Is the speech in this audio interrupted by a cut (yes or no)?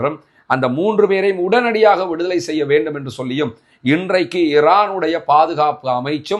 no